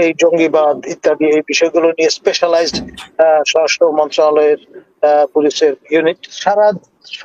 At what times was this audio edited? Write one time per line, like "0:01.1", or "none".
0:06.3